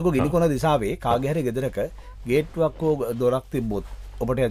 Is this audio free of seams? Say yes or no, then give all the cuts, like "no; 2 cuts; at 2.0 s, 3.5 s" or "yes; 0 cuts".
yes; 0 cuts